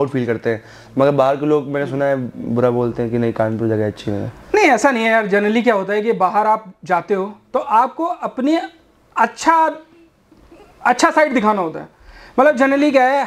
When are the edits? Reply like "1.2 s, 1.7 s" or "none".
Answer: none